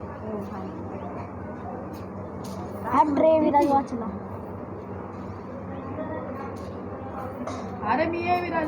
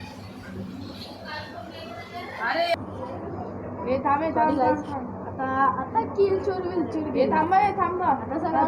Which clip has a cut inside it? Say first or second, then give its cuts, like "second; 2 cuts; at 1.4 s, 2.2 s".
second; 1 cut; at 2.8 s